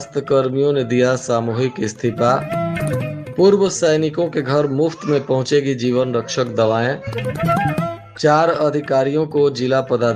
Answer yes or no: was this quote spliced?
no